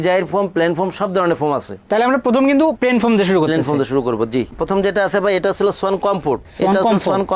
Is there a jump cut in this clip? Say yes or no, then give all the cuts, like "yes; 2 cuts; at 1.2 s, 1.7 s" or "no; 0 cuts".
no; 0 cuts